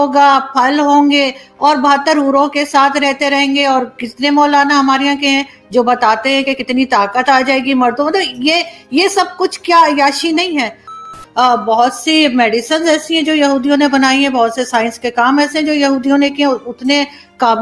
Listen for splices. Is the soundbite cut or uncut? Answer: cut